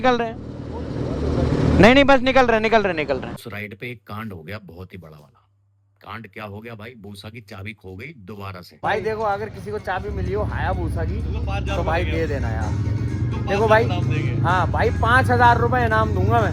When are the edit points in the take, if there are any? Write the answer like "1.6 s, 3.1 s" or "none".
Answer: 3.4 s, 8.8 s